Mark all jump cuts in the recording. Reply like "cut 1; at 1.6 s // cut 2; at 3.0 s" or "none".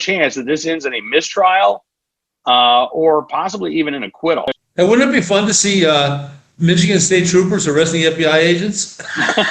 cut 1; at 4.5 s